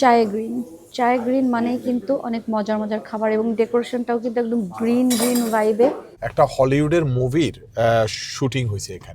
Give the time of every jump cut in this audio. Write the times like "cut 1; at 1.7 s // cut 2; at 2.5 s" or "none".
cut 1; at 6.1 s